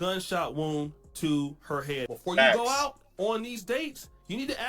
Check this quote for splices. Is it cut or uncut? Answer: cut